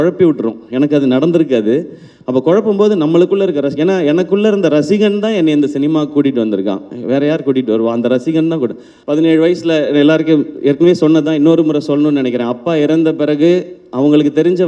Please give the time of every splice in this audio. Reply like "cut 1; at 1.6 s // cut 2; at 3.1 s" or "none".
cut 1; at 8.9 s

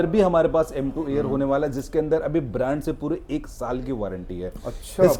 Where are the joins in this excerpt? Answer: none

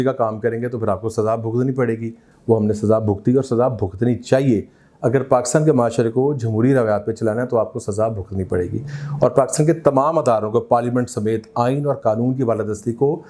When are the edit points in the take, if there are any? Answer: none

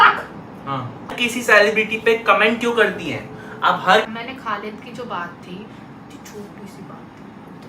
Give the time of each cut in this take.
cut 1; at 1.1 s // cut 2; at 4.1 s

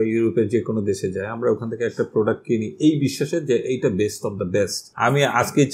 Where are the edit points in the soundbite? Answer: cut 1; at 4.8 s

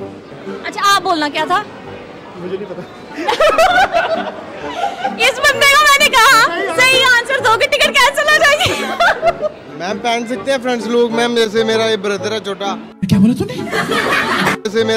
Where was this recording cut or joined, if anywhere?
cut 1; at 9.7 s

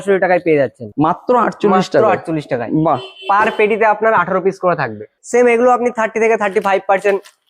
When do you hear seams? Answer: cut 1; at 0.8 s // cut 2; at 5.1 s

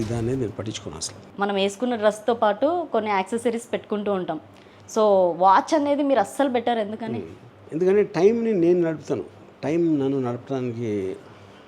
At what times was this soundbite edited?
cut 1; at 1.2 s

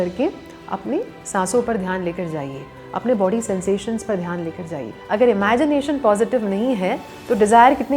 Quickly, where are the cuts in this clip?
cut 1; at 4.9 s

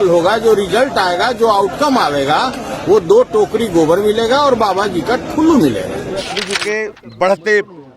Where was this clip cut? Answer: cut 1; at 6.0 s

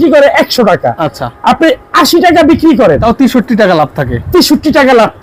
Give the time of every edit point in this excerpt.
cut 1; at 3.0 s

